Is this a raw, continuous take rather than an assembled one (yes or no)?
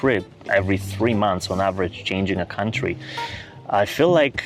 yes